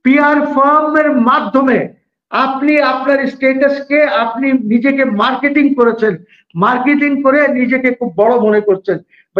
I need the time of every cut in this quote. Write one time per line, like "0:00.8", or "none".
none